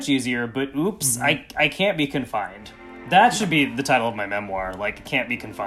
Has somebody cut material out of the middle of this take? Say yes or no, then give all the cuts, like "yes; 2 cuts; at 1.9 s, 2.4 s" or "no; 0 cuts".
no; 0 cuts